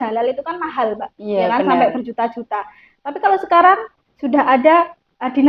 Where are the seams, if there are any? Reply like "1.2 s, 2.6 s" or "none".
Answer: none